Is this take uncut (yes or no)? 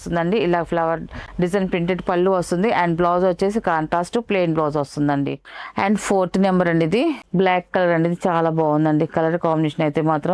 yes